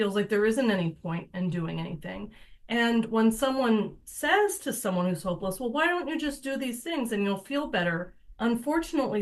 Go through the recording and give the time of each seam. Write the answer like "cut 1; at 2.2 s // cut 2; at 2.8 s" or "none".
none